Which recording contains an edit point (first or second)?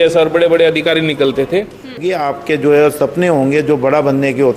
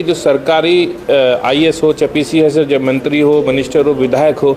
first